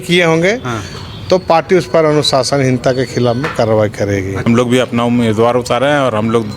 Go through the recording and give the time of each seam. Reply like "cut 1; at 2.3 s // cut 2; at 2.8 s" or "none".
cut 1; at 4.4 s